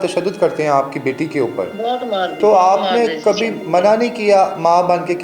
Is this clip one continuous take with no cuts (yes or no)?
no